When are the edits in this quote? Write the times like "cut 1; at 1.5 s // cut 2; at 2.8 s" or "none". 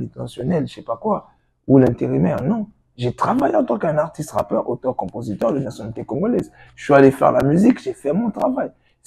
none